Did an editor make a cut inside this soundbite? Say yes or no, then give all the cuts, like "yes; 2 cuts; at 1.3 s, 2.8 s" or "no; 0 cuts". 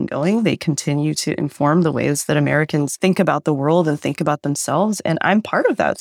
no; 0 cuts